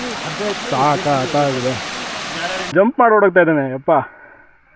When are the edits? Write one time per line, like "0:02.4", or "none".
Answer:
0:02.7